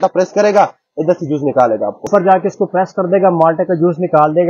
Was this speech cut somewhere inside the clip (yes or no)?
yes